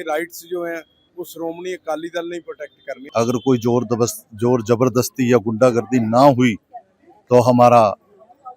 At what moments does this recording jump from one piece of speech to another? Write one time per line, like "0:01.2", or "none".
0:03.0